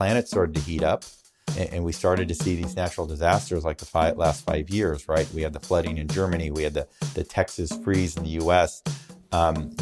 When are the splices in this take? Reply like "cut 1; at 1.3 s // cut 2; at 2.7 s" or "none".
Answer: cut 1; at 1.5 s